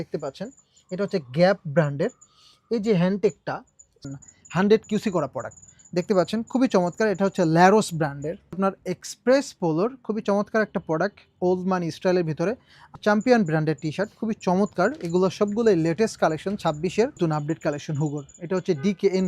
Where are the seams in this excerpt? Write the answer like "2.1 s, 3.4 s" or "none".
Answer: 4.0 s, 8.6 s, 12.9 s, 17.2 s